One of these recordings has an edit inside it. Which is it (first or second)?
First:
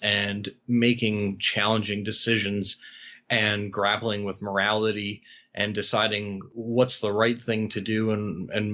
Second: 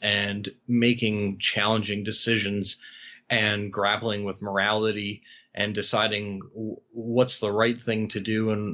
first